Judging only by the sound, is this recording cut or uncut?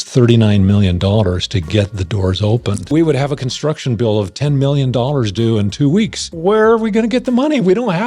cut